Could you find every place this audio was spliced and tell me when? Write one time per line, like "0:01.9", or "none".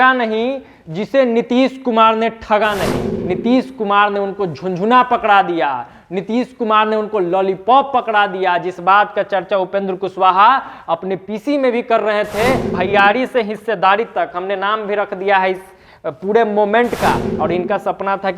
0:03.1
0:12.7
0:17.3